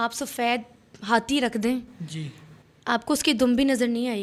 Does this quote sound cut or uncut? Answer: uncut